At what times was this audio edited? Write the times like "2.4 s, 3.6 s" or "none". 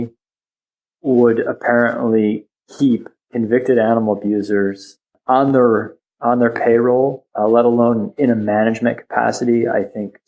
5.1 s